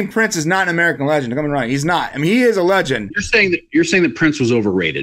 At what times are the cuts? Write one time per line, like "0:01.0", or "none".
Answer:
0:03.1